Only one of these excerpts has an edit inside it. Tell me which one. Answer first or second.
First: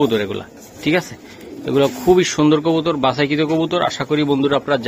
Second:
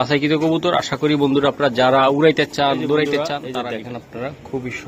second